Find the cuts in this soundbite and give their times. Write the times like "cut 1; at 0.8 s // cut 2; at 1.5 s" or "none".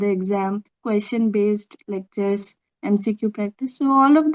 none